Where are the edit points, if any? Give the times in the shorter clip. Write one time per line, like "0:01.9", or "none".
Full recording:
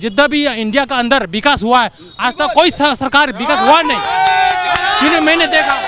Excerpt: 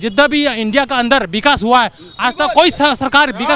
none